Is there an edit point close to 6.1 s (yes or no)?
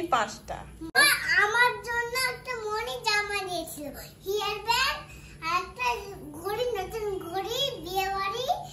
no